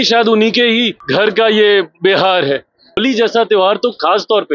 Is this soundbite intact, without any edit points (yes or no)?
no